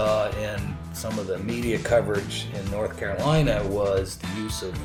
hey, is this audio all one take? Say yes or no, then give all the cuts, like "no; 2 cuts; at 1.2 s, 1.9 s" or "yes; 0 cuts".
yes; 0 cuts